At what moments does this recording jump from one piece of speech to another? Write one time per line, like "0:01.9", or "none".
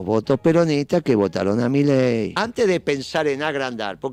none